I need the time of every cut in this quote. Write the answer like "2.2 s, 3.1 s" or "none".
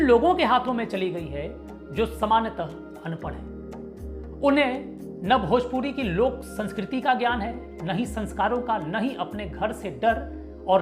none